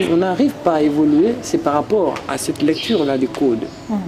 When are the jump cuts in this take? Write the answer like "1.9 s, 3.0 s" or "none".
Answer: none